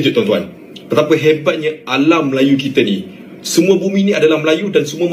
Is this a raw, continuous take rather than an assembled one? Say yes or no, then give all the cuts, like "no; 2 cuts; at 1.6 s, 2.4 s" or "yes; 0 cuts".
yes; 0 cuts